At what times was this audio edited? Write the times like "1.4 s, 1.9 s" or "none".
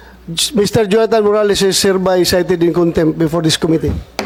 none